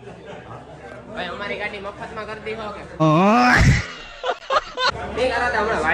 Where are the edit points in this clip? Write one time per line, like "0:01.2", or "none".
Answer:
0:03.0
0:04.8